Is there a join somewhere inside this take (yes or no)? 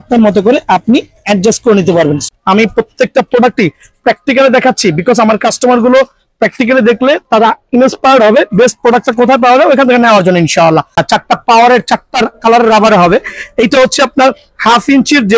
yes